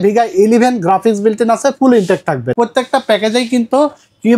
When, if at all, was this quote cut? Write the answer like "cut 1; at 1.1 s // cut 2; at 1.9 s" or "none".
cut 1; at 2.5 s